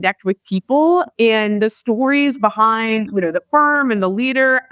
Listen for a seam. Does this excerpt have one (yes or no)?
no